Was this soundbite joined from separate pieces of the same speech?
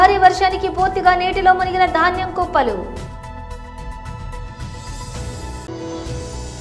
yes; 2 cuts; at 3.4 s, 5.6 s

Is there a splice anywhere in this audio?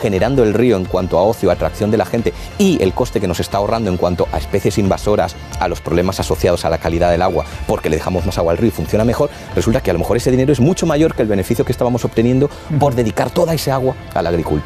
no; 0 cuts

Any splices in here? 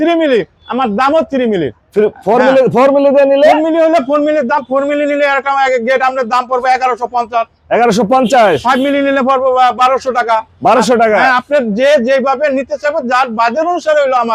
no; 0 cuts

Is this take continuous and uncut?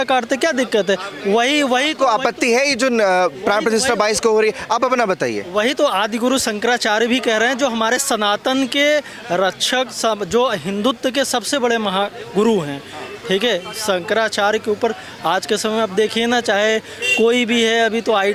yes; 0 cuts

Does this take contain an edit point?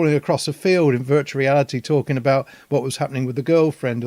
no; 0 cuts

